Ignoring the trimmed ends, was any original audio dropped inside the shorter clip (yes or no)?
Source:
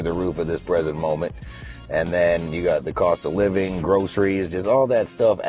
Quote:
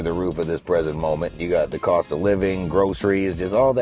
yes